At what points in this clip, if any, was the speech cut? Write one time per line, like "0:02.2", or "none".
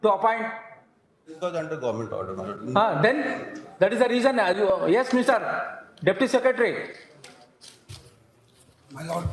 none